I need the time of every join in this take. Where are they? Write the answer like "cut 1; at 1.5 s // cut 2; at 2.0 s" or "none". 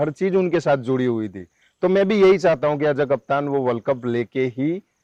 none